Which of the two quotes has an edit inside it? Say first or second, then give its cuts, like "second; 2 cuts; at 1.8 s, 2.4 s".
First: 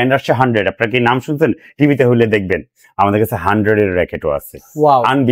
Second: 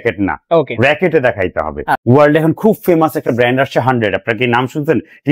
second; 1 cut; at 2.0 s